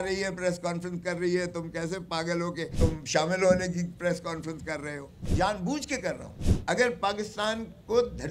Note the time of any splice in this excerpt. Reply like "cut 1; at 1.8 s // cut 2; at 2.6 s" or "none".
cut 1; at 2.7 s // cut 2; at 5.3 s